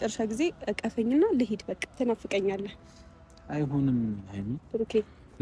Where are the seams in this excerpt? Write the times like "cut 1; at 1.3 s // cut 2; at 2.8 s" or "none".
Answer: cut 1; at 1.8 s

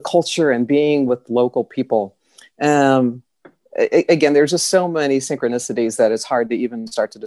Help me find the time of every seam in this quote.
none

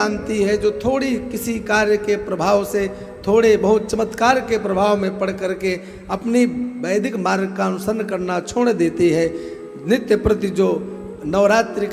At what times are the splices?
none

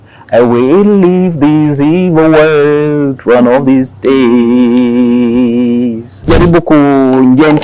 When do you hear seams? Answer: cut 1; at 6.3 s

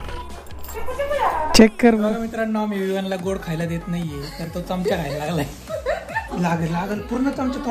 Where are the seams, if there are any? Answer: cut 1; at 2.1 s // cut 2; at 6.3 s

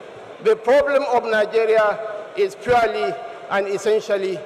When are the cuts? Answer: none

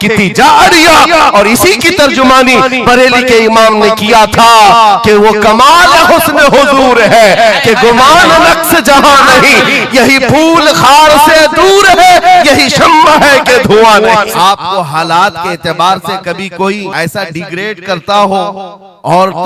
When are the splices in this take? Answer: cut 1; at 14.3 s // cut 2; at 16.9 s

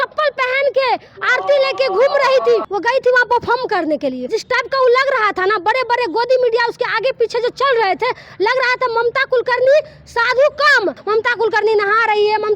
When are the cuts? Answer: cut 1; at 2.7 s // cut 2; at 4.2 s // cut 3; at 11.0 s

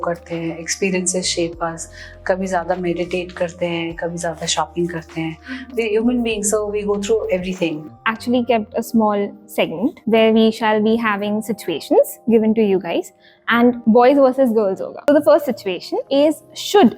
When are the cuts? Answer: cut 1; at 7.8 s // cut 2; at 10.0 s // cut 3; at 13.8 s // cut 4; at 15.1 s // cut 5; at 15.9 s

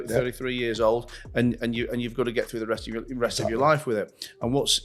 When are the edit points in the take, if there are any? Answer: none

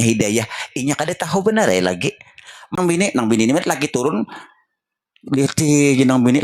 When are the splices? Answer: cut 1; at 2.7 s

